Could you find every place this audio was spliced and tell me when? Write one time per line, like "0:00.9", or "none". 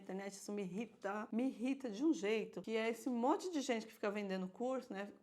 0:01.3
0:02.6